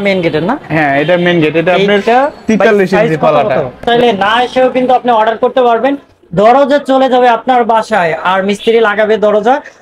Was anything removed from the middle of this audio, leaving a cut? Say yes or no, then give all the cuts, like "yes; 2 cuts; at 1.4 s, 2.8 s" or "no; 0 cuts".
yes; 1 cut; at 3.9 s